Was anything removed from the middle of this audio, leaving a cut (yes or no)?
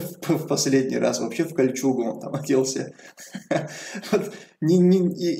no